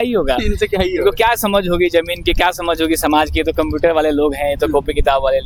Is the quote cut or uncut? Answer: uncut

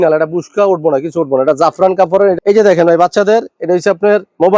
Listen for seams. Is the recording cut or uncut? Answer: cut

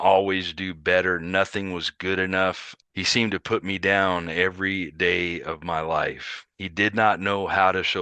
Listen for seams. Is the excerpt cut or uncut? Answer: cut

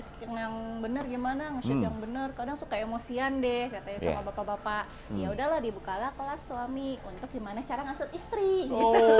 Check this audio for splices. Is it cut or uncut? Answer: uncut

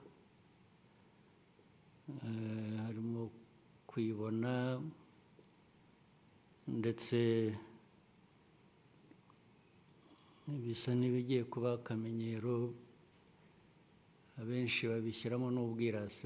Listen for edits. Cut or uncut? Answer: uncut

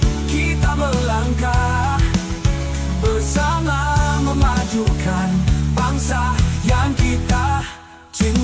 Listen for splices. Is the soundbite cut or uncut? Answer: uncut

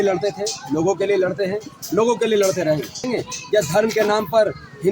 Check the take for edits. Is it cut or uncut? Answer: cut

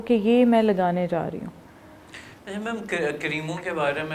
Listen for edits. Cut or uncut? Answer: uncut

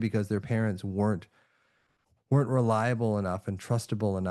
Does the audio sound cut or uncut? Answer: uncut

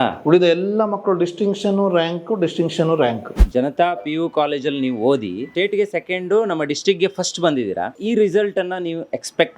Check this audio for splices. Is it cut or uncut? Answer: cut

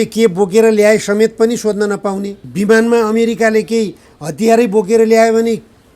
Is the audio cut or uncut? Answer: cut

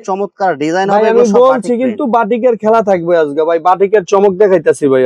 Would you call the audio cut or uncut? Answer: uncut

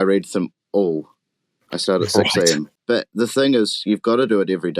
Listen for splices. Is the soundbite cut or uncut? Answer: cut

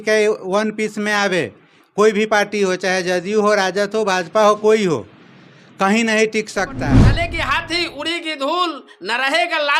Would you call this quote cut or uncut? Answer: cut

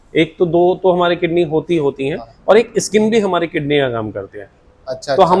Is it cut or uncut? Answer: uncut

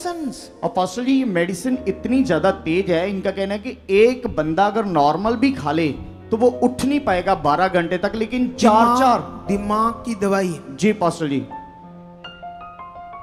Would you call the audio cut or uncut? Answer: uncut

